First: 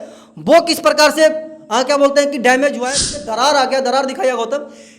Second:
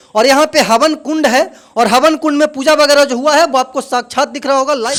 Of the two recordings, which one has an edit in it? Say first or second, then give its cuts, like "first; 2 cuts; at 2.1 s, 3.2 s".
first; 1 cut; at 2.8 s